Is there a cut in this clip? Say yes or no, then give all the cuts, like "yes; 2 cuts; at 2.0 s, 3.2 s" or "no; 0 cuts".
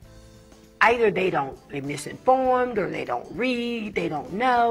no; 0 cuts